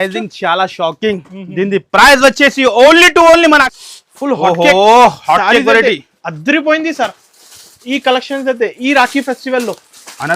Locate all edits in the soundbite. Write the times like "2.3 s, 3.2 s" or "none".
3.7 s